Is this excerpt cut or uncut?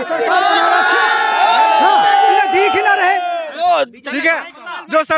cut